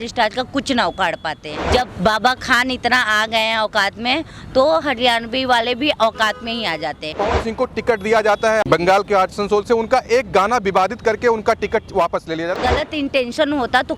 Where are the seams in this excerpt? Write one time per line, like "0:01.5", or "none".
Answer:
0:01.5
0:07.1
0:08.6
0:12.6

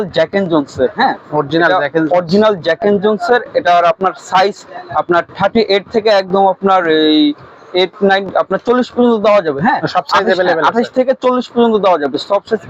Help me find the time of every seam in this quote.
none

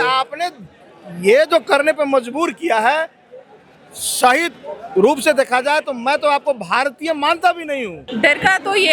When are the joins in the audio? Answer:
0:08.0

